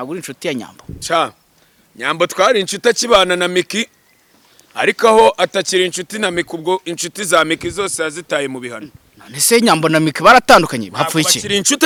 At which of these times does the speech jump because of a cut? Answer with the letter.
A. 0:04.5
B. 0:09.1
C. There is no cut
C